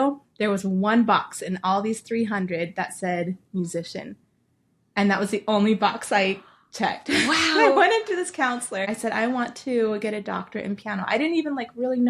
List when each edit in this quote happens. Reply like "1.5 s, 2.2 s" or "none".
8.8 s